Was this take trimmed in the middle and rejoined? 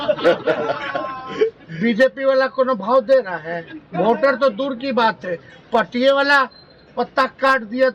no; 0 cuts

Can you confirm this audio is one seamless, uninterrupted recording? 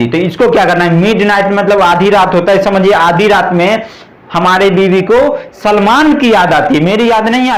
yes; 0 cuts

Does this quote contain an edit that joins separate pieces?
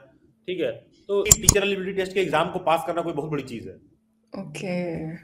yes; 1 cut; at 1.3 s

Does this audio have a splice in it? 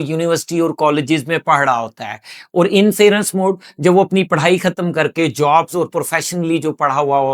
no; 0 cuts

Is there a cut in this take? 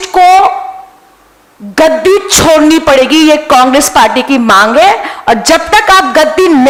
no; 0 cuts

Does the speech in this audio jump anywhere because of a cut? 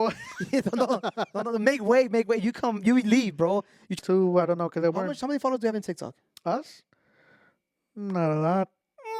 yes; 1 cut; at 3.9 s

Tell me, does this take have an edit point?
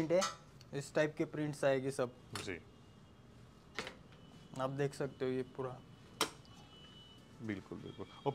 no; 0 cuts

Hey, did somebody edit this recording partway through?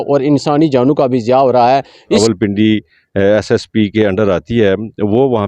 yes; 1 cut; at 2.2 s

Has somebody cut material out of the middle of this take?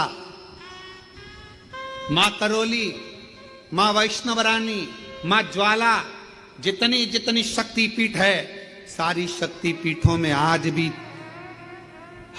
no; 0 cuts

